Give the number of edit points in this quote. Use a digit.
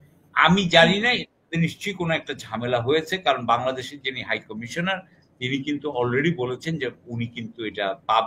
0